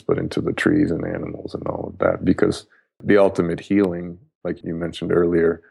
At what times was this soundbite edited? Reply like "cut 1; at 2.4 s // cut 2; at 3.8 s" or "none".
cut 1; at 3.0 s // cut 2; at 4.6 s